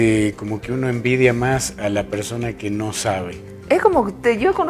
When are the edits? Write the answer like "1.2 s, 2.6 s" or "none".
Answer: 2.4 s